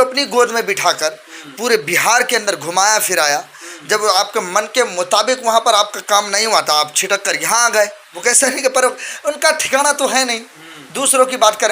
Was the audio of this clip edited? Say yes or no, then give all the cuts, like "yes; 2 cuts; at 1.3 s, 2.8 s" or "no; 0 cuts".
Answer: yes; 1 cut; at 8.0 s